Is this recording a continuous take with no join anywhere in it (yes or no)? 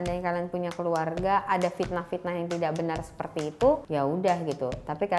yes